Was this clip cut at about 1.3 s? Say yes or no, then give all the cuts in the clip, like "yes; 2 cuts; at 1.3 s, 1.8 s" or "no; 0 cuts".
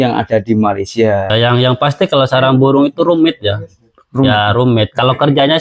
yes; 1 cut; at 1.3 s